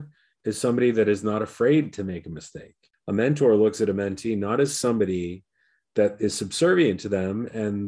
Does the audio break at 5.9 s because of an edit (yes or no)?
no